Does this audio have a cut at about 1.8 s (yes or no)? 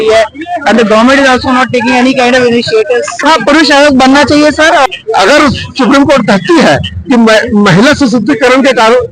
no